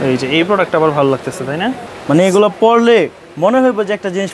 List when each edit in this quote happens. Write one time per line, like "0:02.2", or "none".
0:01.9